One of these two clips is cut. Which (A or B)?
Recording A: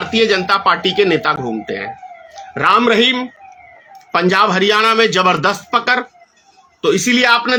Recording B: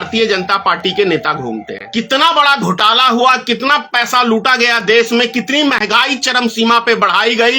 B